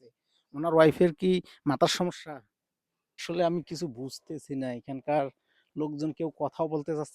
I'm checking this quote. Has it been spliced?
yes; 1 cut; at 3.2 s

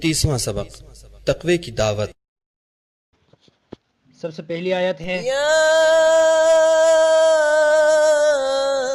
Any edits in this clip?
no; 0 cuts

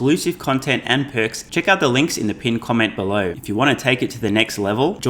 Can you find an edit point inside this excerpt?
yes; 2 cuts; at 1.4 s, 3.4 s

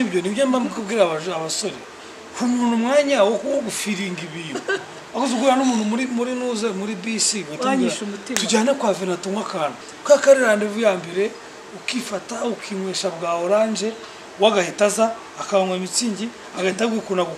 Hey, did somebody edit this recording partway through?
yes; 1 cut; at 9.9 s

